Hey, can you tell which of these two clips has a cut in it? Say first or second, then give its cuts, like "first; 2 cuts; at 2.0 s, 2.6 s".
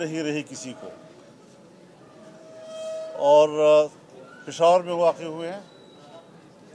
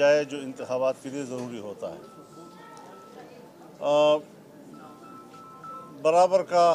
first; 1 cut; at 4.0 s